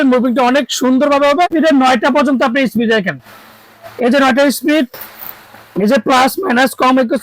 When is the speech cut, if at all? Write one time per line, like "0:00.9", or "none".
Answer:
0:01.5